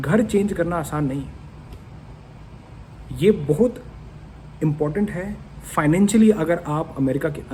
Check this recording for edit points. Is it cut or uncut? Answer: uncut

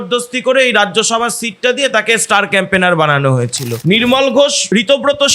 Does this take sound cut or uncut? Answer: cut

